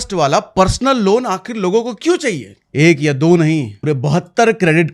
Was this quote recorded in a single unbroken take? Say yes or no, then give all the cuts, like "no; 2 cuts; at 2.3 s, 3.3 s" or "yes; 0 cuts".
no; 2 cuts; at 2.5 s, 3.8 s